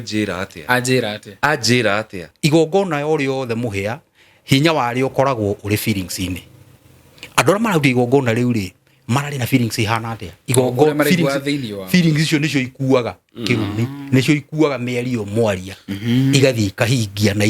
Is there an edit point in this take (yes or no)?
yes